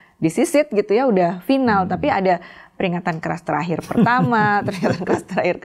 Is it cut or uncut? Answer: uncut